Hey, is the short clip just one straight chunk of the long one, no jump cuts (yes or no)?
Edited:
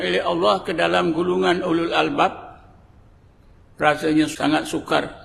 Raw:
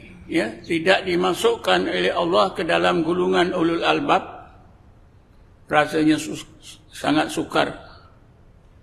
no